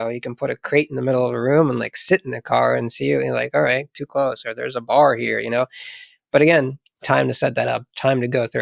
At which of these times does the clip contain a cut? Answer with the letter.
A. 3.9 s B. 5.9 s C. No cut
A